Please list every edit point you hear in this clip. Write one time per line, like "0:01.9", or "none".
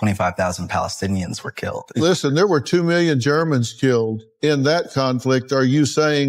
0:04.2